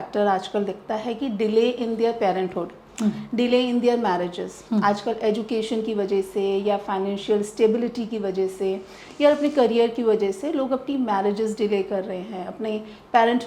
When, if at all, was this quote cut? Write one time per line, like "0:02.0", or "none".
none